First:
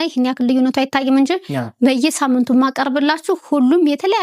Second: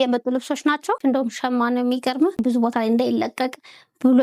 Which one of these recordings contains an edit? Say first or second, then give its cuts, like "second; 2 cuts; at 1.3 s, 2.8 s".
second; 2 cuts; at 1.0 s, 2.4 s